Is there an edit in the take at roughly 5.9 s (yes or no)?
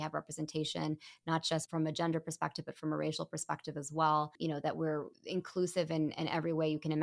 no